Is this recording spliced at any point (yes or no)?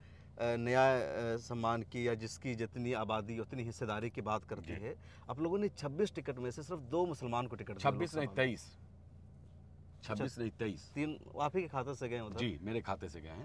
no